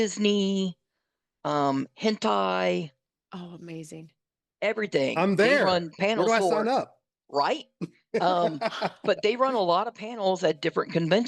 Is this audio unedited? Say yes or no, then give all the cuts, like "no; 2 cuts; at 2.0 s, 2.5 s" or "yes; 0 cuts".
yes; 0 cuts